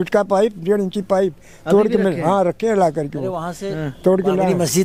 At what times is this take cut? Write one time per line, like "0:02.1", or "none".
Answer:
none